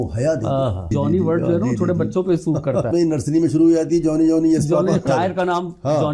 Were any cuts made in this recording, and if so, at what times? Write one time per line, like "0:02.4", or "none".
0:00.9
0:02.9
0:05.0